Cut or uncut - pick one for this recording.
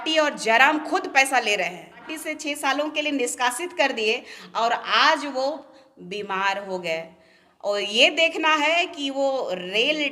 cut